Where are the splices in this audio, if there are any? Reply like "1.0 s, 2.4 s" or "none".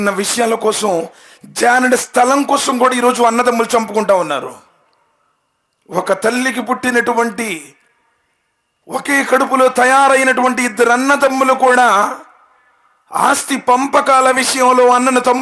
none